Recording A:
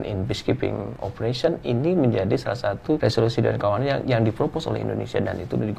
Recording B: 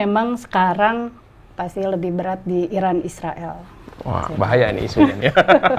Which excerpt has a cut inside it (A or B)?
A